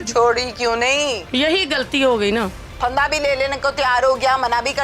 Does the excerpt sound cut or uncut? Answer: uncut